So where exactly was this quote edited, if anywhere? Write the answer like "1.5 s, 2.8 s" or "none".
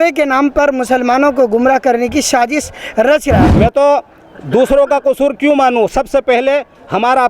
3.5 s